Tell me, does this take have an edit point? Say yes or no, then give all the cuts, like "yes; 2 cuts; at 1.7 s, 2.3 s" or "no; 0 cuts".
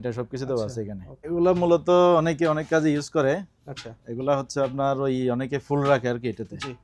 yes; 1 cut; at 1.1 s